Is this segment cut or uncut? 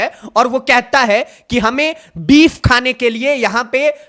uncut